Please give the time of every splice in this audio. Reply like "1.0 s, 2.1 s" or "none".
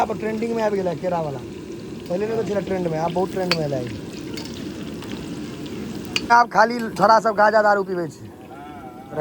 6.3 s